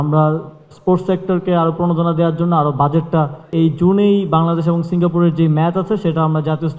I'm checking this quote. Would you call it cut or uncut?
cut